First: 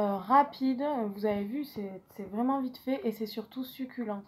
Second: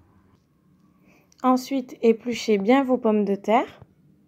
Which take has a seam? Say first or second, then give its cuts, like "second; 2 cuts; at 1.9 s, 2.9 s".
first; 1 cut; at 1.1 s